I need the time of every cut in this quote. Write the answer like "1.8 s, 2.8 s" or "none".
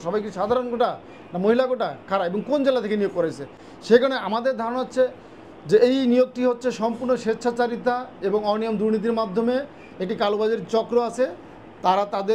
none